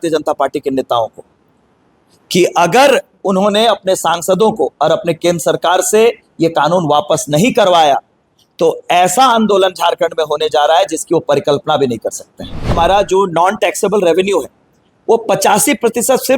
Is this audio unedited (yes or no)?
no